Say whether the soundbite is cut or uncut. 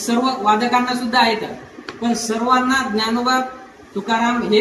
uncut